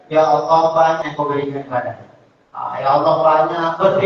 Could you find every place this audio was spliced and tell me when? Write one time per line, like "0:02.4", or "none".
0:01.0